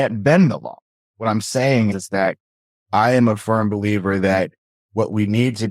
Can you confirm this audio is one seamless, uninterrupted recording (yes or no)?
no